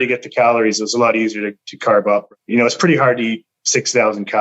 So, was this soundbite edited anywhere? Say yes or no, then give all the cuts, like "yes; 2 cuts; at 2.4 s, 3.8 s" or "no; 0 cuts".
yes; 1 cut; at 2.3 s